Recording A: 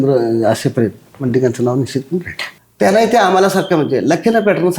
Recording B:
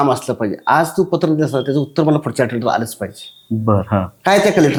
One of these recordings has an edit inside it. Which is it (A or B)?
A